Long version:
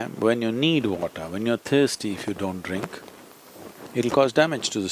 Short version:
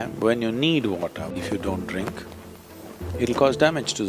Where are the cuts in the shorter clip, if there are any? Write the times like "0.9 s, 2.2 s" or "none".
1.3 s